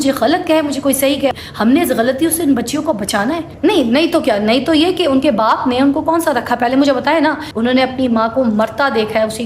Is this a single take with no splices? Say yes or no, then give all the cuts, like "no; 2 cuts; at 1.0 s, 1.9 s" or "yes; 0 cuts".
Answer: no; 3 cuts; at 1.3 s, 3.5 s, 7.5 s